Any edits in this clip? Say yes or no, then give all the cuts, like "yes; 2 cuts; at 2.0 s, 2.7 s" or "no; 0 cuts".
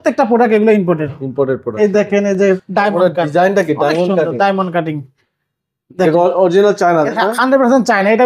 yes; 1 cut; at 2.6 s